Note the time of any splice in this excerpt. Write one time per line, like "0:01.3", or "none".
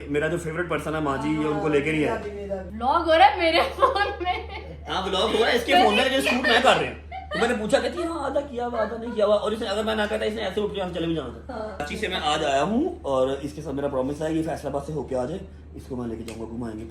0:02.6
0:11.8